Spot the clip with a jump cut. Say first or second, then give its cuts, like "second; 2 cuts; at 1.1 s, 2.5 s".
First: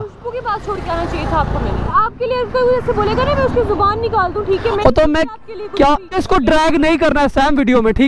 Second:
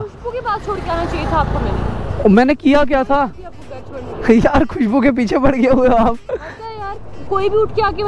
first; 2 cuts; at 1.9 s, 6.1 s